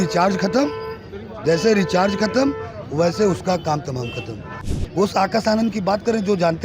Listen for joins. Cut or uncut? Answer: cut